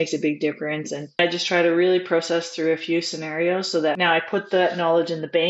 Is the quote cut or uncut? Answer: cut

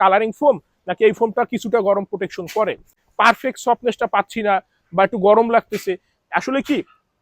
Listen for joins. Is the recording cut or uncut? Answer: cut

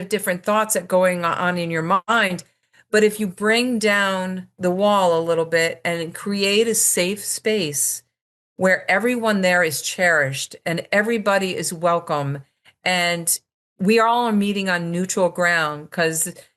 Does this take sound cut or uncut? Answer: uncut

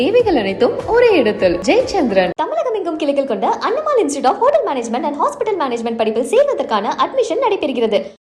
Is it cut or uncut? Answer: uncut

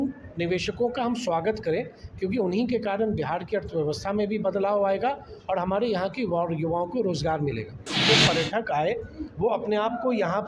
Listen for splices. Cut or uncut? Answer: cut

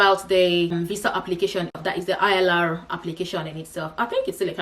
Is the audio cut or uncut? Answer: cut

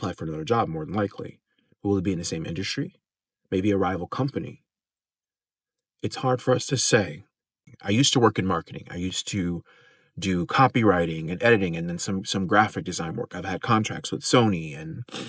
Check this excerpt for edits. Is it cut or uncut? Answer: cut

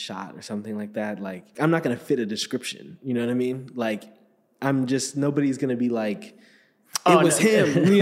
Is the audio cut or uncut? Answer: cut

